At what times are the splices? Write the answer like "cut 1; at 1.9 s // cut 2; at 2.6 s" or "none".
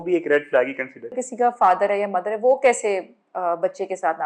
cut 1; at 1.2 s